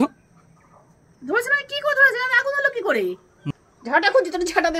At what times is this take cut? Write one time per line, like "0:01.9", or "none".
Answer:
0:03.3